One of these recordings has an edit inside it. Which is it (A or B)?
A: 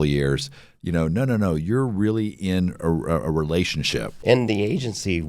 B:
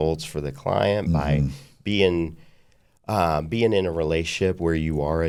A